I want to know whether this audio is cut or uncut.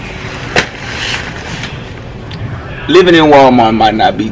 uncut